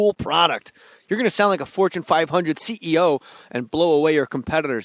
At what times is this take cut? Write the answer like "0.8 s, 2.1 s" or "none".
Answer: 3.9 s